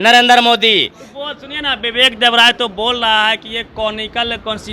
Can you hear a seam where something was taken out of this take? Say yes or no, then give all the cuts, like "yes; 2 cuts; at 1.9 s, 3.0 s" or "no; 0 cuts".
no; 0 cuts